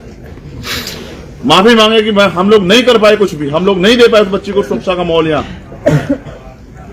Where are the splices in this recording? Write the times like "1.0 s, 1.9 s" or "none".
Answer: none